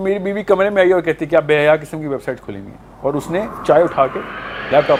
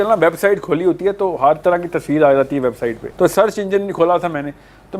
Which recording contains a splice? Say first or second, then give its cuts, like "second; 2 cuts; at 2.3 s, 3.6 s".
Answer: second; 1 cut; at 3.0 s